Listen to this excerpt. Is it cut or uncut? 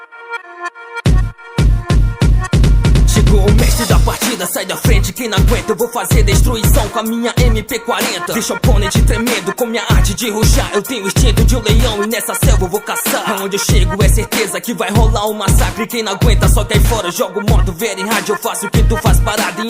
cut